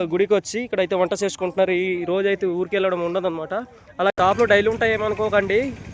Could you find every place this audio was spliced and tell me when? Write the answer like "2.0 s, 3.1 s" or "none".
4.1 s